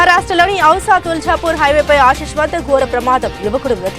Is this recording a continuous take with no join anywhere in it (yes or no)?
yes